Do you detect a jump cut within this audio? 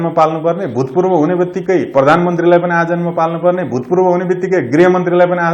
no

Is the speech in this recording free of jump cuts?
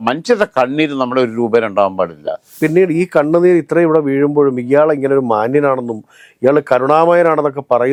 yes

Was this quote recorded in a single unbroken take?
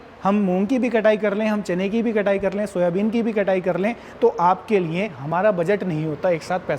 no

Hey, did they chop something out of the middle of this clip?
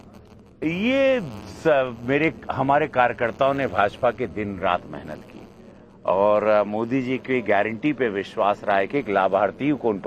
yes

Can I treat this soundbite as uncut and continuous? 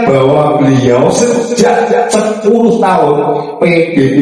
yes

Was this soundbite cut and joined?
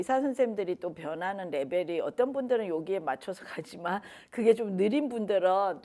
no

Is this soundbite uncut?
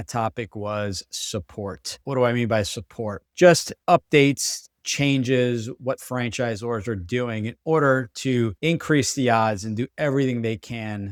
yes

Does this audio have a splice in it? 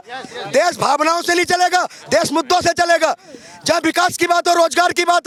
no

